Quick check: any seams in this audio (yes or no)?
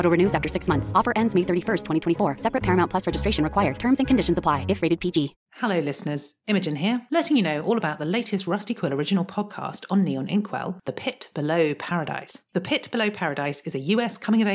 yes